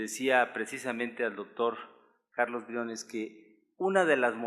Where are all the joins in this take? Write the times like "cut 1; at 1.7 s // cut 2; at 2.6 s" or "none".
cut 1; at 2.5 s